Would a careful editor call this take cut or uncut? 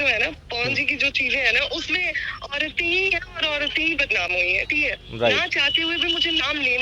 uncut